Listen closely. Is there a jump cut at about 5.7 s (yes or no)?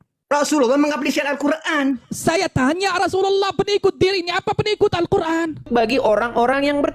yes